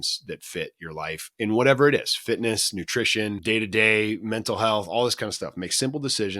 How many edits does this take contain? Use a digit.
1